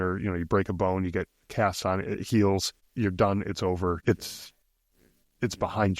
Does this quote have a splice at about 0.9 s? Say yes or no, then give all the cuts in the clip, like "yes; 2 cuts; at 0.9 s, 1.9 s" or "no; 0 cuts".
no; 2 cuts; at 2.8 s, 4.0 s